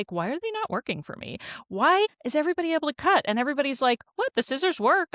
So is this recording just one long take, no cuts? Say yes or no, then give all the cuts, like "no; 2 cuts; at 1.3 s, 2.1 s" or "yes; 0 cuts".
no; 1 cut; at 2.1 s